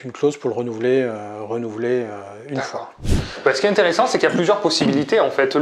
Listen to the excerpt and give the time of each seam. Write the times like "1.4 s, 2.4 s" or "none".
3.0 s